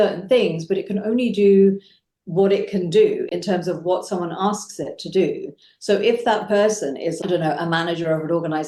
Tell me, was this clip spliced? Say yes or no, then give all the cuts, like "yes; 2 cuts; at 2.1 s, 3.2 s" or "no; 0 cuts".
no; 0 cuts